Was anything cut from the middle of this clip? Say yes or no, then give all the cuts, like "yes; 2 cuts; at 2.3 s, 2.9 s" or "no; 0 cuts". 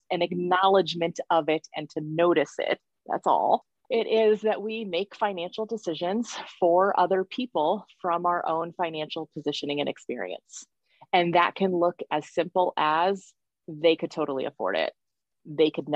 yes; 2 cuts; at 2.9 s, 3.7 s